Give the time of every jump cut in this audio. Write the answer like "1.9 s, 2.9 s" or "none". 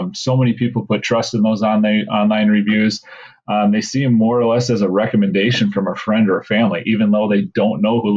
none